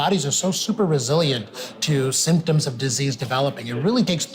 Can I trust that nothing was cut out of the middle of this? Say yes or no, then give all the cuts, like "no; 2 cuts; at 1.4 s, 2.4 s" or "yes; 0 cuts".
yes; 0 cuts